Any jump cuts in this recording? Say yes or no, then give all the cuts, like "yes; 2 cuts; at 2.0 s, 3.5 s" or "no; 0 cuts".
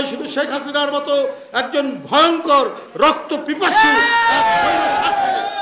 no; 0 cuts